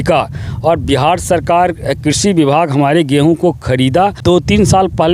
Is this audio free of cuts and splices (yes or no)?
no